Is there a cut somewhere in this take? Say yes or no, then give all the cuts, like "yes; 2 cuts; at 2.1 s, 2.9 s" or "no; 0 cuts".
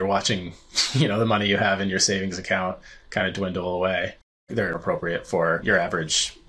yes; 1 cut; at 4.3 s